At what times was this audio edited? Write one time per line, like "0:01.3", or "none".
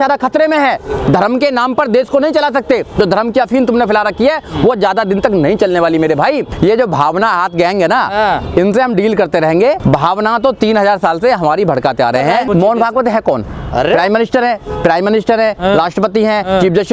0:06.5
0:09.8
0:12.5